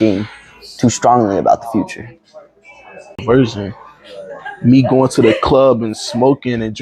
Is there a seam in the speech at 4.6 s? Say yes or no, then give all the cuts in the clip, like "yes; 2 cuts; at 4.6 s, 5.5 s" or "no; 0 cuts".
no; 1 cut; at 3.2 s